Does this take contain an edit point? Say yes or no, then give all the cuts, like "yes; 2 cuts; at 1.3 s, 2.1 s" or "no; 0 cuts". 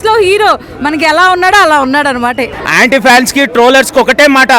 yes; 1 cut; at 2.5 s